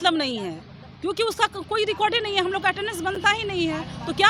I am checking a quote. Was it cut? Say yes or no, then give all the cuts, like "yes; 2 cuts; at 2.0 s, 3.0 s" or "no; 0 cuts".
no; 0 cuts